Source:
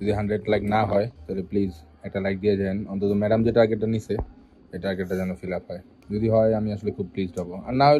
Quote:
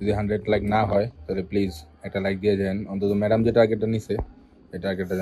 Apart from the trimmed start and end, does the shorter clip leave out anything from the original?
no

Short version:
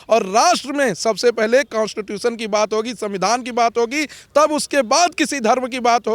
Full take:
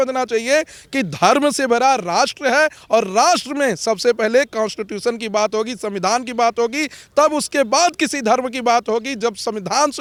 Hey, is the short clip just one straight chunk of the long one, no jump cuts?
yes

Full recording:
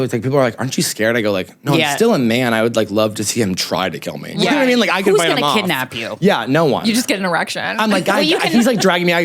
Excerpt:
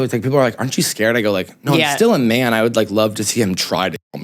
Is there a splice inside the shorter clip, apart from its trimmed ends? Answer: no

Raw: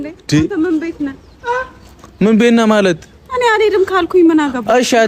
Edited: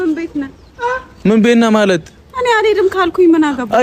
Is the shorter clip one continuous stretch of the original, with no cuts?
no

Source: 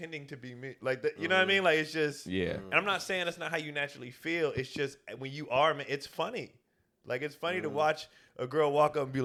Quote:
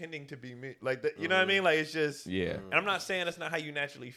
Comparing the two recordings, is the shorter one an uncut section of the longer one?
yes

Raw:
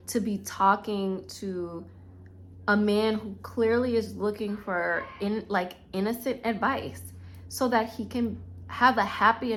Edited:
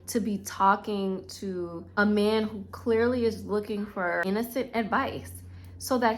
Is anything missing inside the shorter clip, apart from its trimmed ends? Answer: yes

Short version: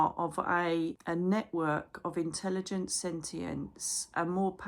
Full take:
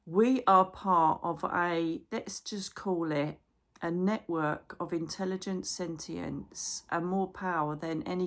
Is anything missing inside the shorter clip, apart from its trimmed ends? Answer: yes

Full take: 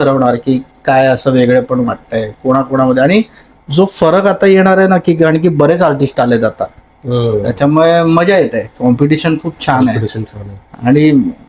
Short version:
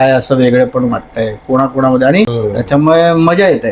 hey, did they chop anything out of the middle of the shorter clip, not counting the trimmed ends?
yes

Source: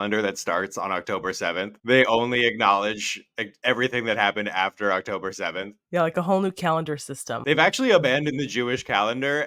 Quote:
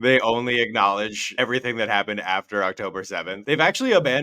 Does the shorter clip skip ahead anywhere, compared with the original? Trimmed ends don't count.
yes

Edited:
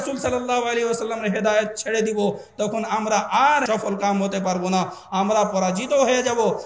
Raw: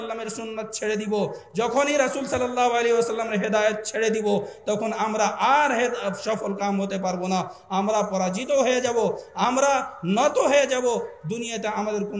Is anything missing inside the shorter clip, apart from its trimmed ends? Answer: yes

